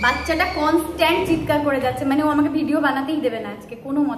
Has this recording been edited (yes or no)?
no